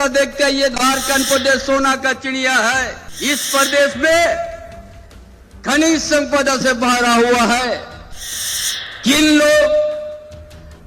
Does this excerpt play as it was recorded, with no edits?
no; 1 cut; at 3.0 s

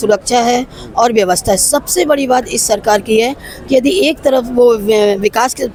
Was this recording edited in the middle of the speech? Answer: no; 0 cuts

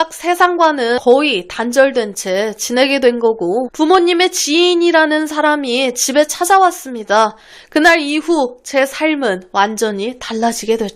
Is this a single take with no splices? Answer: no; 2 cuts; at 1.0 s, 3.7 s

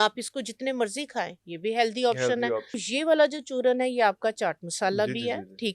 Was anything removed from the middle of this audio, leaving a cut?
yes; 1 cut; at 2.8 s

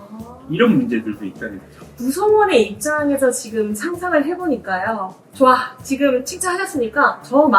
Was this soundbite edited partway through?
yes; 2 cuts; at 1.9 s, 5.2 s

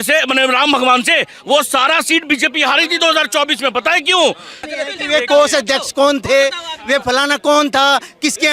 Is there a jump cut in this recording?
yes; 1 cut; at 4.5 s

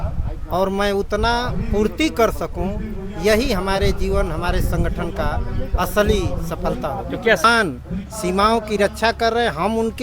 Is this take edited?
yes; 1 cut; at 7.4 s

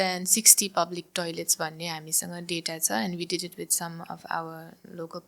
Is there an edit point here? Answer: no; 0 cuts

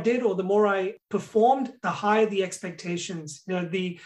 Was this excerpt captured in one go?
no; 1 cut; at 1.0 s

